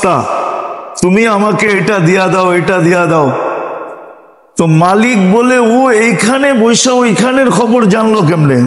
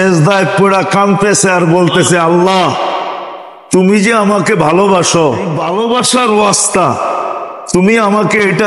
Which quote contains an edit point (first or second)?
second